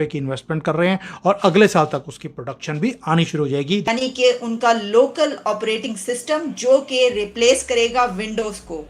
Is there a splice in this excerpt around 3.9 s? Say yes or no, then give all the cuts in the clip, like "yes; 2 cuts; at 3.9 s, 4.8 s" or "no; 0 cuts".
yes; 1 cut; at 3.9 s